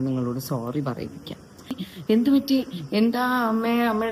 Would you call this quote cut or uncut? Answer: cut